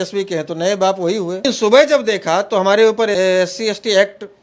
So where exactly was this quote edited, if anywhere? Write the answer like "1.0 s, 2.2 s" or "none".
1.4 s, 3.1 s